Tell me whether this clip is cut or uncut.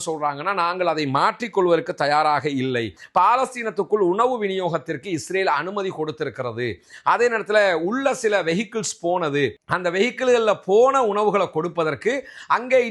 cut